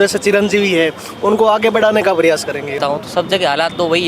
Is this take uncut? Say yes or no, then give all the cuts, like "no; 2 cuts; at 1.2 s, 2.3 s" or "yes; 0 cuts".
no; 1 cut; at 2.7 s